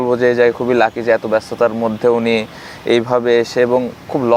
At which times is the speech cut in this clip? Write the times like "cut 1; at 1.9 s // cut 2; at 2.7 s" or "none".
none

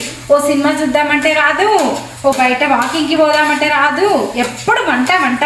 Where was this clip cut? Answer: none

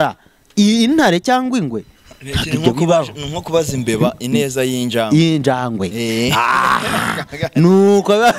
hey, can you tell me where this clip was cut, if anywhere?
none

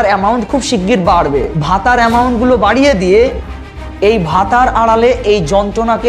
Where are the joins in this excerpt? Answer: none

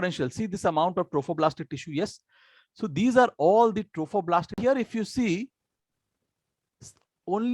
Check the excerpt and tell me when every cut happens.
cut 1; at 4.6 s

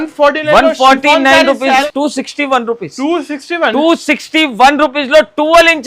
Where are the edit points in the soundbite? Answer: cut 1; at 1.8 s

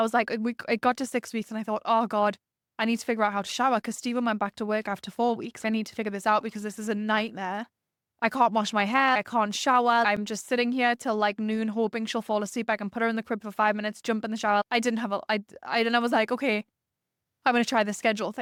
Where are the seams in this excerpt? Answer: none

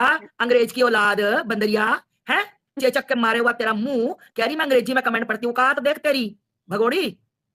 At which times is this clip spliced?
none

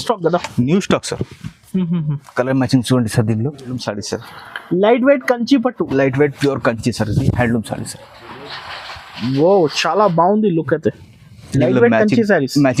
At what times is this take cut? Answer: cut 1; at 3.8 s

